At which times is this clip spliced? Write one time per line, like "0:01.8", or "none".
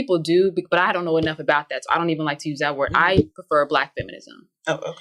none